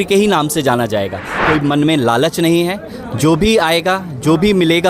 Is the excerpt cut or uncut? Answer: cut